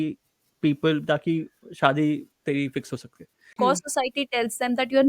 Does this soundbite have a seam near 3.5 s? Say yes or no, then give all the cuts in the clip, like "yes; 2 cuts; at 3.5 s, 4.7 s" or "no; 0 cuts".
yes; 1 cut; at 3.5 s